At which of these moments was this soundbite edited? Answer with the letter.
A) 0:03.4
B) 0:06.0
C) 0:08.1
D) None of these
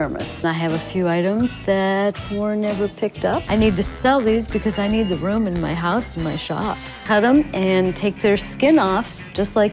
D